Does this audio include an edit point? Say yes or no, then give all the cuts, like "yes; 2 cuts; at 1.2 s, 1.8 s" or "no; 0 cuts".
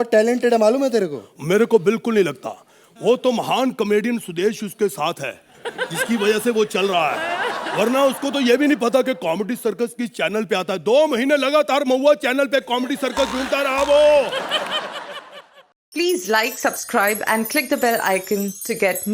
yes; 1 cut; at 15.3 s